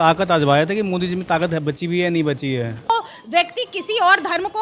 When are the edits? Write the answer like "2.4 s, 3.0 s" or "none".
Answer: 2.9 s